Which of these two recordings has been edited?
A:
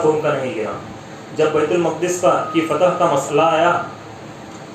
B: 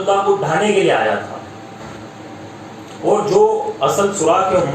B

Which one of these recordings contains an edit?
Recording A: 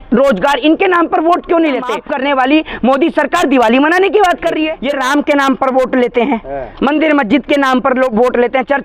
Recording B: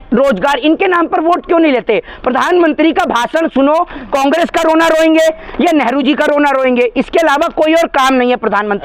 A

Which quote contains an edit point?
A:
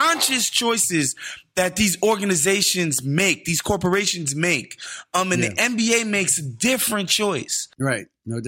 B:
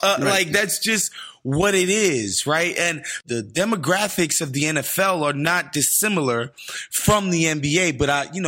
B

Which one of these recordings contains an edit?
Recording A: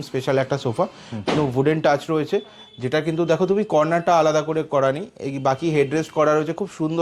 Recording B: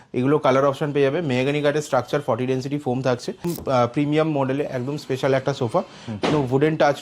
B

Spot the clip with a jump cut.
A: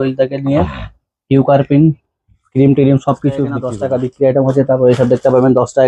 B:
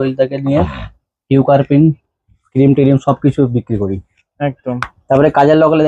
A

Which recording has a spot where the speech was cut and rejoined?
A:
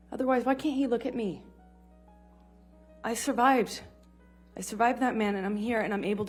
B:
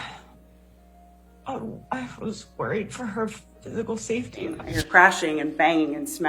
B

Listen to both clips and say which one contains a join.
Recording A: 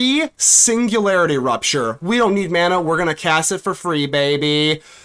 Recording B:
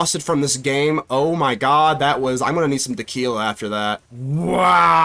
B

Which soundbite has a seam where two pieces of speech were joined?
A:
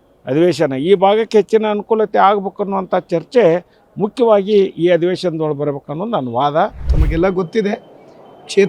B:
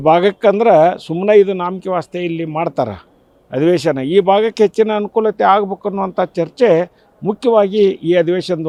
A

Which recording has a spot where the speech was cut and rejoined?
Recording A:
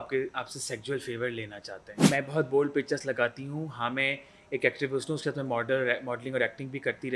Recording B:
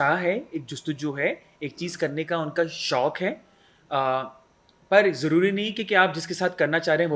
A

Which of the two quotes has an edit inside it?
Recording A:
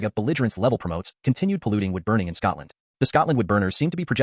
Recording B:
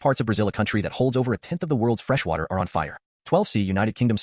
B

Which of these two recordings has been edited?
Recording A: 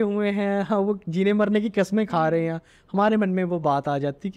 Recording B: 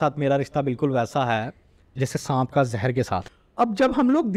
B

